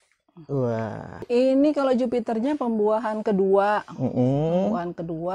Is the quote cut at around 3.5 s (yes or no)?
no